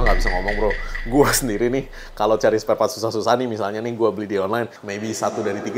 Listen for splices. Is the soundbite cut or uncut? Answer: cut